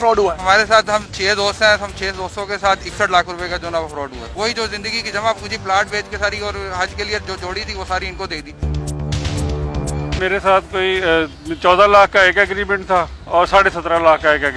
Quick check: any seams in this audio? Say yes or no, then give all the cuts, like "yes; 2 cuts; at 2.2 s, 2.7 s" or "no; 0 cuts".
yes; 2 cuts; at 4.3 s, 10.1 s